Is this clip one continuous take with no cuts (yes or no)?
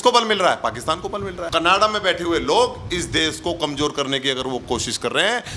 no